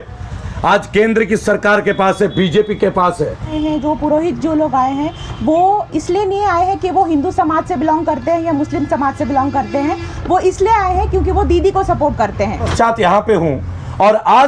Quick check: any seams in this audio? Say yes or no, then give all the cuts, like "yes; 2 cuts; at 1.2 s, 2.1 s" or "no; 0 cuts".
yes; 2 cuts; at 3.5 s, 12.7 s